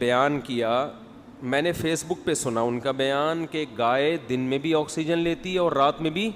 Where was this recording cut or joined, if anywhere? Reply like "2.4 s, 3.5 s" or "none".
none